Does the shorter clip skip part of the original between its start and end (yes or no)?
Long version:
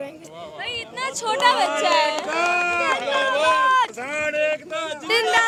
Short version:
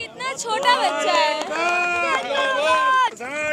no